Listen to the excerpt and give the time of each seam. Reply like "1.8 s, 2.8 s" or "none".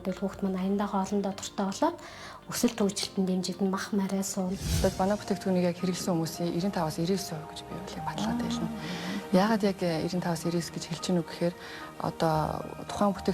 4.8 s